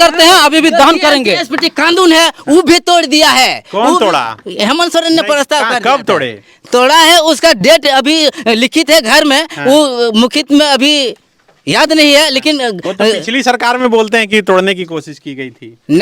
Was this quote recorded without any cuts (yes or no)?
yes